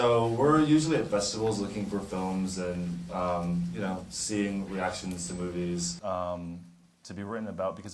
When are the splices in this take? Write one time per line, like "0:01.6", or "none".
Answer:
none